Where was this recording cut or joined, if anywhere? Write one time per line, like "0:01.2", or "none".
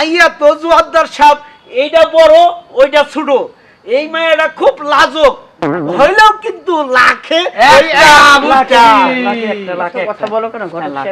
none